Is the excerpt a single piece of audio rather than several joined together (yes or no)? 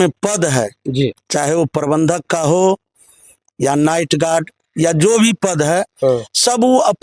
yes